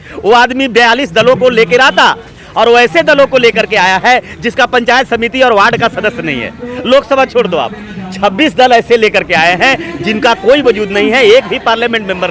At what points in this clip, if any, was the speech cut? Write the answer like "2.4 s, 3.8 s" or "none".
none